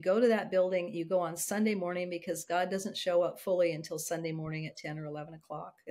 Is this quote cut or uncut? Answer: uncut